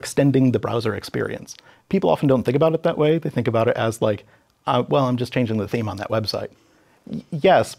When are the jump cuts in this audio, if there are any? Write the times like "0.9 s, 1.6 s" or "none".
1.7 s